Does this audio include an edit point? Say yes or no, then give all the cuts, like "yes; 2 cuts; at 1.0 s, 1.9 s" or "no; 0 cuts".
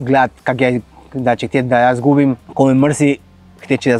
yes; 1 cut; at 2.4 s